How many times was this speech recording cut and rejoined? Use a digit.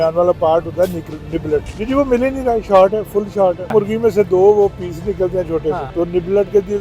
3